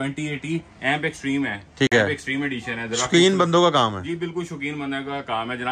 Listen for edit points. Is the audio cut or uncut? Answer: uncut